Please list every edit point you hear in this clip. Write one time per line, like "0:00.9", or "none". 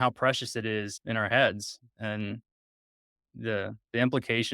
0:00.9
0:01.8